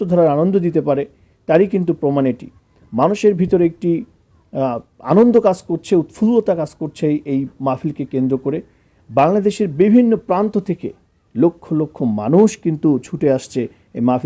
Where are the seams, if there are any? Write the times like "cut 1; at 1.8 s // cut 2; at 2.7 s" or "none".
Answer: none